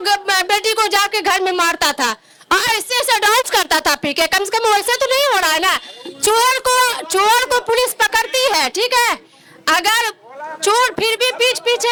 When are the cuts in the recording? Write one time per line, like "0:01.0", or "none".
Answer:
none

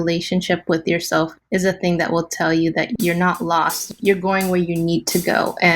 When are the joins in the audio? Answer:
0:03.8

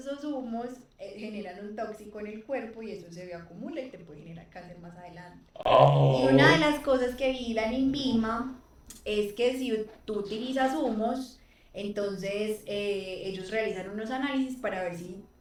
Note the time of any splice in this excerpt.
none

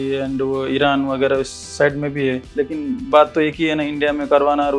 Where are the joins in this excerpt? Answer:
none

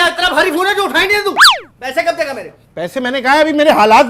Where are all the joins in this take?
none

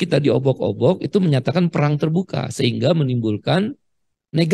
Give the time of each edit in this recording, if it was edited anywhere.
none

